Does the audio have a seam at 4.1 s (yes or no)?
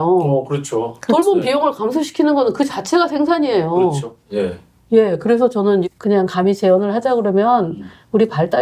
no